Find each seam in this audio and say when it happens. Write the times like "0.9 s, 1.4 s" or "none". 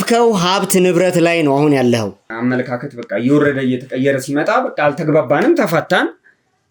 2.2 s